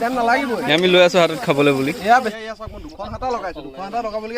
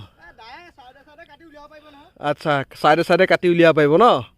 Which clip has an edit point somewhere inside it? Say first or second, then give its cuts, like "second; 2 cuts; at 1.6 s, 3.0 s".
first; 1 cut; at 2.3 s